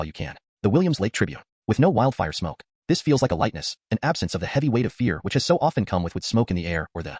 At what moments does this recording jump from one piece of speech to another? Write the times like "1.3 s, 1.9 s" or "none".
none